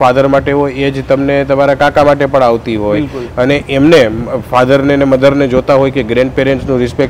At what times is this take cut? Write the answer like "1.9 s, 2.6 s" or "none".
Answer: none